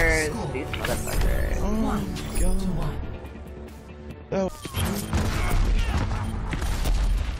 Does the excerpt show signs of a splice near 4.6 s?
yes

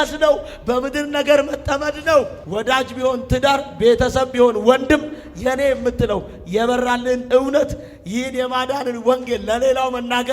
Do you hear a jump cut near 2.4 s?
yes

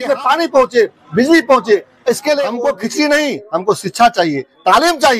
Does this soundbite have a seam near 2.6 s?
yes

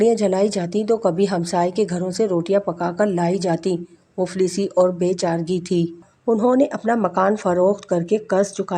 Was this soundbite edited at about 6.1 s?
yes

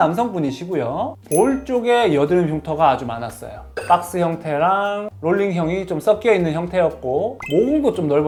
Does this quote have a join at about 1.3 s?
no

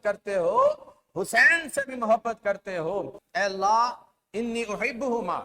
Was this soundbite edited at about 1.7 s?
no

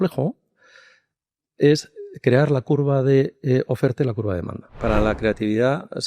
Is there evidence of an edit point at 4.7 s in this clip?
yes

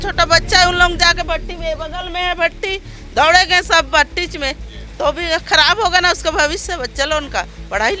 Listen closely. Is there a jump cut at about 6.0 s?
no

